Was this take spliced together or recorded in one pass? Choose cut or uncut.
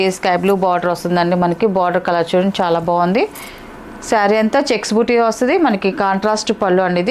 uncut